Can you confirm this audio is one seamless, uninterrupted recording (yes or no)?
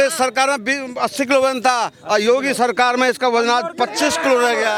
yes